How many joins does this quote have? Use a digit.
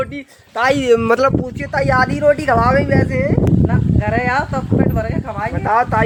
0